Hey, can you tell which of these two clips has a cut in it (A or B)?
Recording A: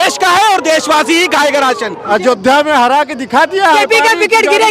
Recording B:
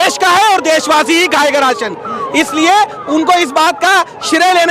A